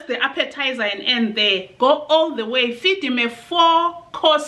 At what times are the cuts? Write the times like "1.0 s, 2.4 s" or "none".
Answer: none